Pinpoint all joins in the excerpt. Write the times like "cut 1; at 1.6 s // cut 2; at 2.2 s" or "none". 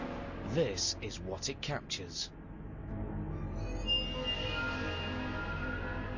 none